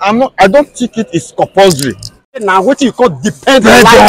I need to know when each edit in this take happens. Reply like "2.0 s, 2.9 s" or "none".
2.4 s